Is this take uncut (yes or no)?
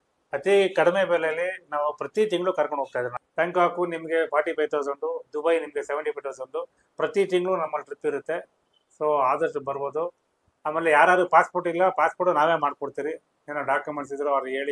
yes